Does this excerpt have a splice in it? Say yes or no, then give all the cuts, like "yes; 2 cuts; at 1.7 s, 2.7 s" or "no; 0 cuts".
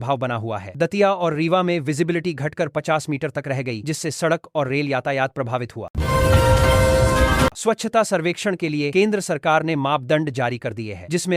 yes; 2 cuts; at 5.8 s, 7.6 s